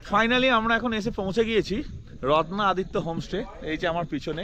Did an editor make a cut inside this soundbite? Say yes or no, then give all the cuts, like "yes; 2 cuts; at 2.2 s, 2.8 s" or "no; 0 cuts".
no; 0 cuts